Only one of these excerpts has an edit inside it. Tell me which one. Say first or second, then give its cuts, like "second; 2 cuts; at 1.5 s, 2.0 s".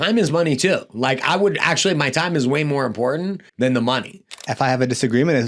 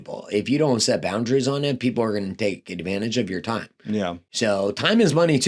first; 2 cuts; at 3.4 s, 4.4 s